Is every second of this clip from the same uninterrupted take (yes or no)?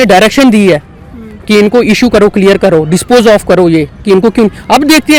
yes